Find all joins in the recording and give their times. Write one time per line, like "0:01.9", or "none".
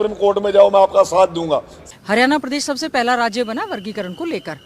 0:01.8